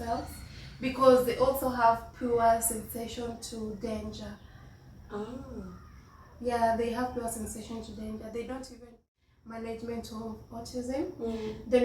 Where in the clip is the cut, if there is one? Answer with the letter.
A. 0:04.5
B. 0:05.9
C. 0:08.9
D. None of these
C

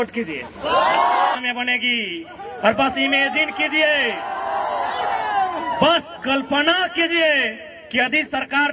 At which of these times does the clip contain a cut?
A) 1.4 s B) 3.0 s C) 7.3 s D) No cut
A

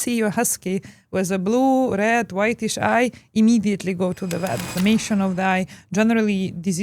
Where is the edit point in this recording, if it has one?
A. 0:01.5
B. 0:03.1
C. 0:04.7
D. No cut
C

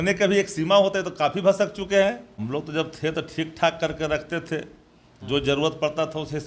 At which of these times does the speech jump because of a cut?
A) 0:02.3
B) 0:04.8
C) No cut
A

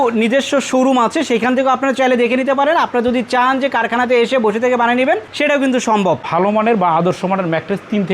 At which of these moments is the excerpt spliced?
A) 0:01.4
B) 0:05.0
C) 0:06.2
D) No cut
C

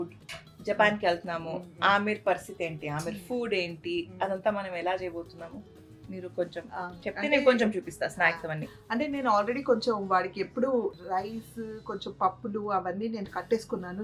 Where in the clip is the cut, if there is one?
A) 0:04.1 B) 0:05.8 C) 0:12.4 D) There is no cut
D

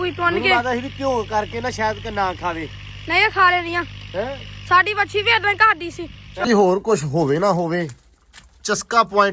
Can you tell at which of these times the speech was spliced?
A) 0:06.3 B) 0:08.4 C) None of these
A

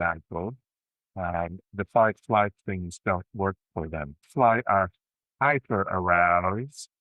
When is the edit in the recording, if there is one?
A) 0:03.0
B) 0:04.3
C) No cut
B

